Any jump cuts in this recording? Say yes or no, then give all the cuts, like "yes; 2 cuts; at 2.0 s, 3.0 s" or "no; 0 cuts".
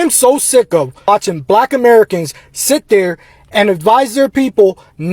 yes; 1 cut; at 1.0 s